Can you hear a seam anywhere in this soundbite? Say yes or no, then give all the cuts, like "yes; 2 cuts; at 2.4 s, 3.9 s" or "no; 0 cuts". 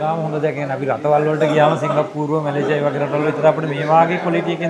no; 0 cuts